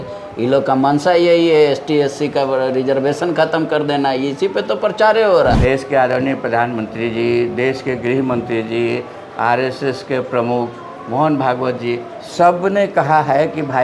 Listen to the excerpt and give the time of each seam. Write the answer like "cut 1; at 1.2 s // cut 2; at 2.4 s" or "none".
cut 1; at 5.6 s